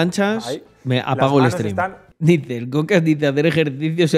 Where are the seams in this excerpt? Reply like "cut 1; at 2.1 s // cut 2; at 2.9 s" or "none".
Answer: cut 1; at 2.0 s